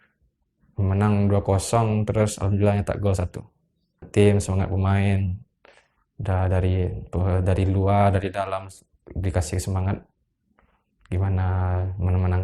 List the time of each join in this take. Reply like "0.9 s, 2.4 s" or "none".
4.0 s

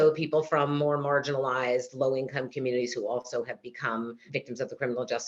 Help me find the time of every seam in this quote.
4.2 s

